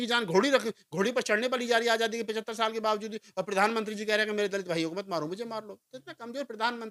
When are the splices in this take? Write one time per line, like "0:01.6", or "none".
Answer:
none